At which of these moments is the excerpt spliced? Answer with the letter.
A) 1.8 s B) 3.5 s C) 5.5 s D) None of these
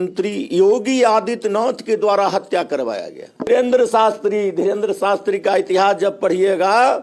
B